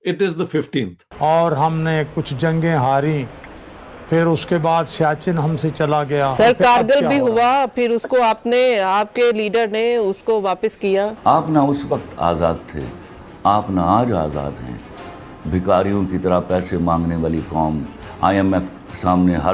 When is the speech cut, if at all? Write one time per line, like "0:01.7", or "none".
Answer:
0:01.0
0:06.3
0:11.2